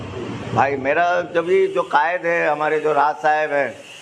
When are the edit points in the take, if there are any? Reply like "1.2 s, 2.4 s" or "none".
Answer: none